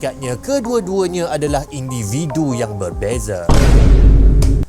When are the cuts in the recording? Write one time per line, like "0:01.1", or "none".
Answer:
0:03.4